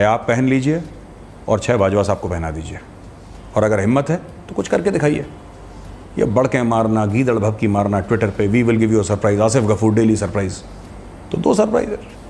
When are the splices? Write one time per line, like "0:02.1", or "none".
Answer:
none